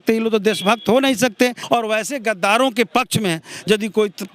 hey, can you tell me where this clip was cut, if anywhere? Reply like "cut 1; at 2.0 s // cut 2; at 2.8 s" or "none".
cut 1; at 1.6 s